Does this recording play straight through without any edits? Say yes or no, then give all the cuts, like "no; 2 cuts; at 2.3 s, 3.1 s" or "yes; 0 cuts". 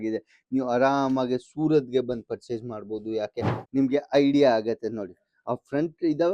no; 1 cut; at 3.6 s